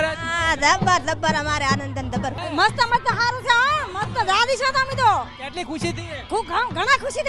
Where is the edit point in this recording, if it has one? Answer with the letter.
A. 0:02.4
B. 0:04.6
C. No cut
A